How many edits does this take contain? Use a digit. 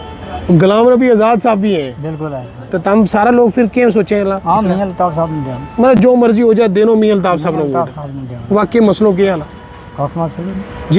0